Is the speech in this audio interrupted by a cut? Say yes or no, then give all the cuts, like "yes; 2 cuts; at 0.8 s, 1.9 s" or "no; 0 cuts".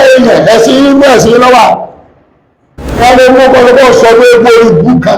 yes; 1 cut; at 3.0 s